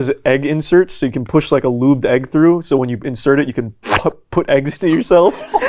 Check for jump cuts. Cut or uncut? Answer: uncut